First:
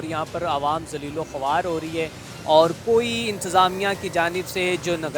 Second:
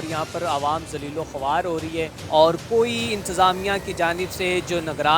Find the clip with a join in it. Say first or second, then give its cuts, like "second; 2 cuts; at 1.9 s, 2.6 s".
second; 1 cut; at 2.2 s